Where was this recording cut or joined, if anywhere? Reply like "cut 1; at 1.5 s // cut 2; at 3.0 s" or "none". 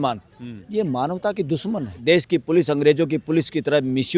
cut 1; at 1.9 s